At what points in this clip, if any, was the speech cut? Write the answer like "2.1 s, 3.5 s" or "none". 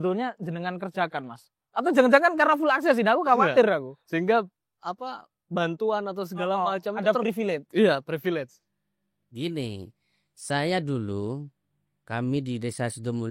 none

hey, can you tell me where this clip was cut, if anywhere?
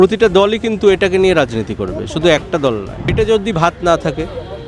3.1 s

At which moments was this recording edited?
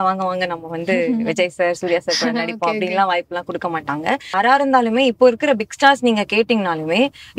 4.3 s

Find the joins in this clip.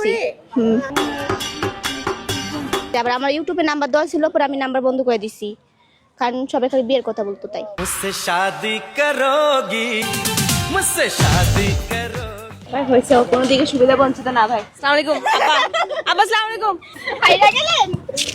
2.9 s, 10.0 s, 17.0 s

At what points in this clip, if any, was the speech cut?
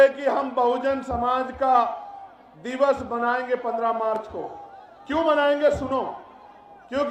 none

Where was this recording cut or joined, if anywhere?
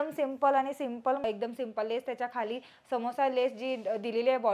1.2 s

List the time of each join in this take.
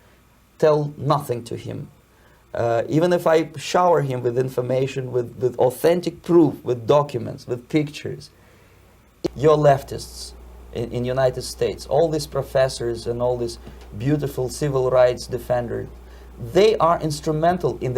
9.3 s

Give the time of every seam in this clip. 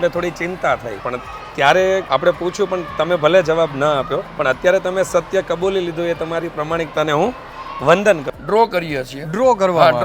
1.0 s, 2.0 s, 4.2 s, 8.3 s

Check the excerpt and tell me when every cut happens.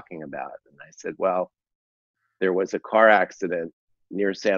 none

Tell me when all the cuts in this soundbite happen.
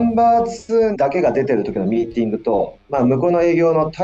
0.9 s, 2.8 s

